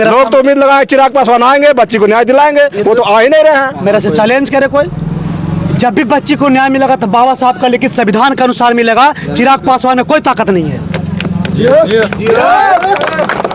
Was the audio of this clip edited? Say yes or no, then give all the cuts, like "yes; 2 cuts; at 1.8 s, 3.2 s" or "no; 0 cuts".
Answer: no; 0 cuts